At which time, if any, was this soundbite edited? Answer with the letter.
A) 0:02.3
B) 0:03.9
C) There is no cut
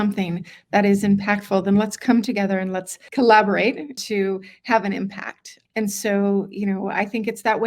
B